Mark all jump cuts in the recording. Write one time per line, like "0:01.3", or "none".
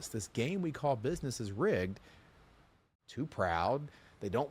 0:02.8